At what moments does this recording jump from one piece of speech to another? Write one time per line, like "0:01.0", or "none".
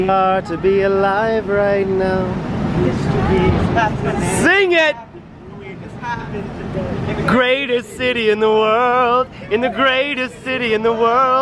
none